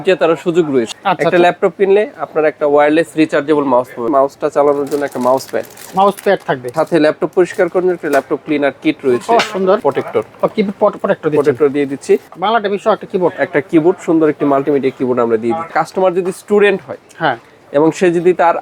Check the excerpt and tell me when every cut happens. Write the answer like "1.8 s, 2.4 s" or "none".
0.9 s, 4.1 s, 6.7 s, 9.8 s, 12.3 s, 15.7 s